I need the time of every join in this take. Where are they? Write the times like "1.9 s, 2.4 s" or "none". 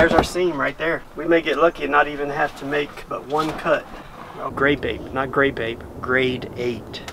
1.1 s, 4.5 s